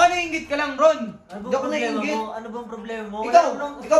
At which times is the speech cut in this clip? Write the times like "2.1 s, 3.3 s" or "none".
none